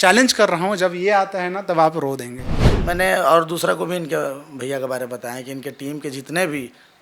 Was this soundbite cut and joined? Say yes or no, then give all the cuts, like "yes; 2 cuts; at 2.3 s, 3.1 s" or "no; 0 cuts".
yes; 1 cut; at 2.7 s